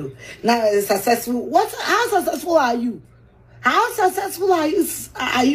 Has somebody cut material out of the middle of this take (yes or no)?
no